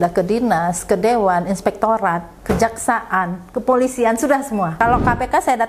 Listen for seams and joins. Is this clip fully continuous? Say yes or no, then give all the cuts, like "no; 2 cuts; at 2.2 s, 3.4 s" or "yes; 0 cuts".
no; 1 cut; at 4.8 s